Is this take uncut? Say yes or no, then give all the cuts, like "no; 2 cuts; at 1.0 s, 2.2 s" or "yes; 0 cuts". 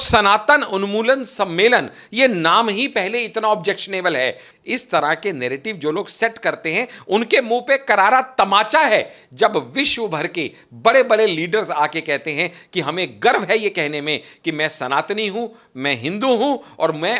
no; 1 cut; at 4.5 s